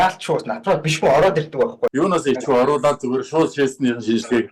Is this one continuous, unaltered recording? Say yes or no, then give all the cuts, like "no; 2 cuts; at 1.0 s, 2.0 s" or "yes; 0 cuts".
no; 1 cut; at 1.9 s